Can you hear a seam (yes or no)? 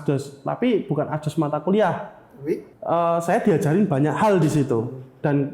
yes